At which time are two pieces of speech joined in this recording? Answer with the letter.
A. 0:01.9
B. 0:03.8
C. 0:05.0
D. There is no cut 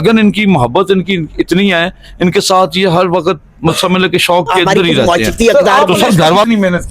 C